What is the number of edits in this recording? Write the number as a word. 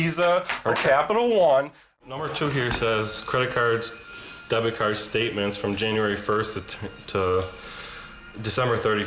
one